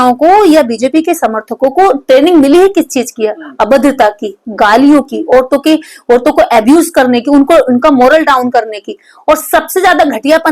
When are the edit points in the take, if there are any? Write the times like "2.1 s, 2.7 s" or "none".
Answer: none